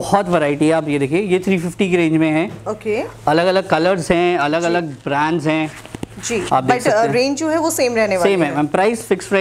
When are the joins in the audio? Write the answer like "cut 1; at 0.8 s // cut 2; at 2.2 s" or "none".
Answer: none

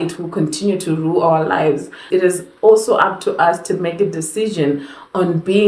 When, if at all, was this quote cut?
cut 1; at 2.1 s

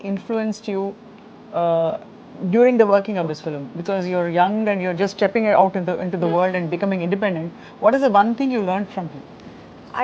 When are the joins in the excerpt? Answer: none

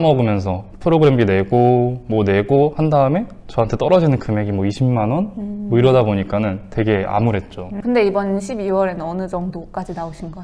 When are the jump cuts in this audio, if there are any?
cut 1; at 7.7 s

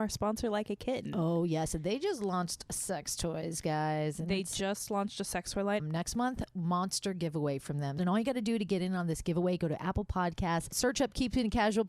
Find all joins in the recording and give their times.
cut 1; at 5.8 s // cut 2; at 8.0 s

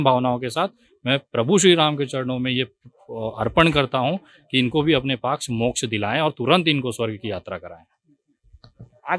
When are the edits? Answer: none

